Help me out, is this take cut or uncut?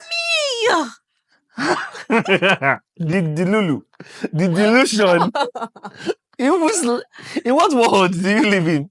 uncut